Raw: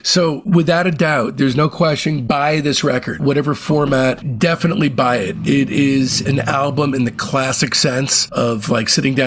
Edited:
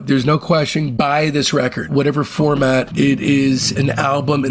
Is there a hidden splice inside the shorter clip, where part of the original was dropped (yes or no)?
yes